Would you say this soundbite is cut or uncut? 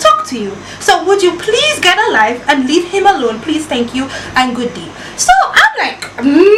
uncut